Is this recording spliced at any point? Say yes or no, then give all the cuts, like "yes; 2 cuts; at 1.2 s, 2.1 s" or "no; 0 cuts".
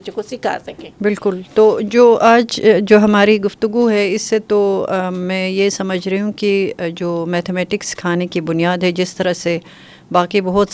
no; 0 cuts